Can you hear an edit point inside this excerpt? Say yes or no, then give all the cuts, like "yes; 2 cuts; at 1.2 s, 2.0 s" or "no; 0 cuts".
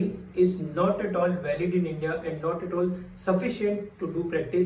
no; 0 cuts